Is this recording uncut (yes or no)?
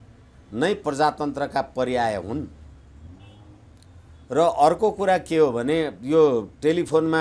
yes